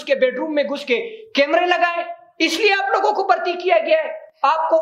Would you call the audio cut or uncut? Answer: uncut